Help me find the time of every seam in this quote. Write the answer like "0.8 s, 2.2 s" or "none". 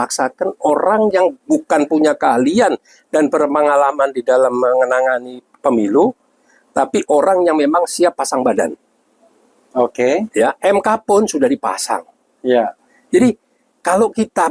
none